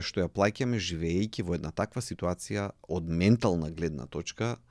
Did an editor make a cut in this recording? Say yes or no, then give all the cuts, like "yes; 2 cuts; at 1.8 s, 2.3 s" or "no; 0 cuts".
no; 0 cuts